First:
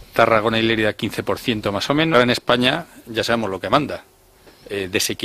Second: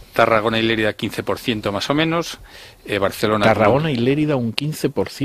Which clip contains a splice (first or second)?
second